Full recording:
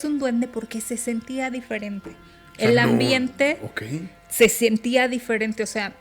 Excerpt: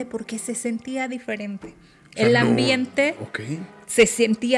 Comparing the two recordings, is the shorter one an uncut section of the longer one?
yes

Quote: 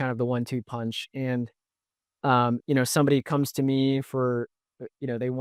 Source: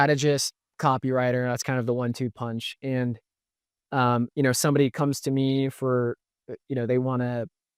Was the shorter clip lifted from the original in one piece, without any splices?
yes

